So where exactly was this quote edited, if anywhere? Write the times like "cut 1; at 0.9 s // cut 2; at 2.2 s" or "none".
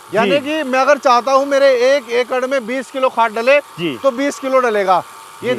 none